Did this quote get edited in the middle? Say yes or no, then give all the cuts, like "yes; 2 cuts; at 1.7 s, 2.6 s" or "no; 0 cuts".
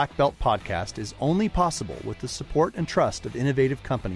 no; 0 cuts